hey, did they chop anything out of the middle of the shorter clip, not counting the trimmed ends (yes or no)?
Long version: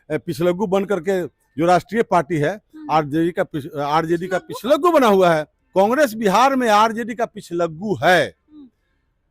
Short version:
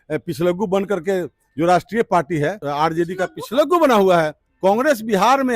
yes